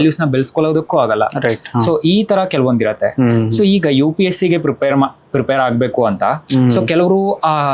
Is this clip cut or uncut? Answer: uncut